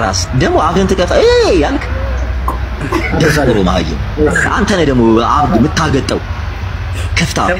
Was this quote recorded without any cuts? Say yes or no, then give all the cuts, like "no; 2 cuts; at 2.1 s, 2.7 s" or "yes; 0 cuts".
yes; 0 cuts